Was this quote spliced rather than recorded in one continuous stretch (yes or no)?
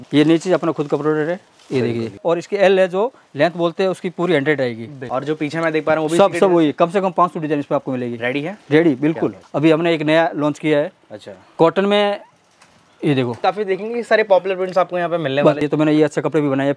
yes